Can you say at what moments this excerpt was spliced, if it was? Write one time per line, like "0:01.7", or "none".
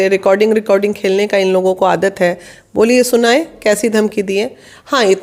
none